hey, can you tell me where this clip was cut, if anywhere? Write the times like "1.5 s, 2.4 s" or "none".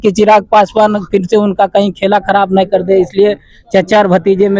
none